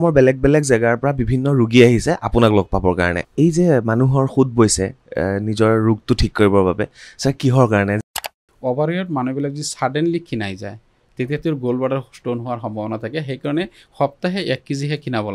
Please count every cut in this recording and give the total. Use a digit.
2